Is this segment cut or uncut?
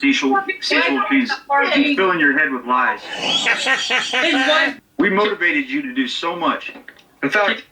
cut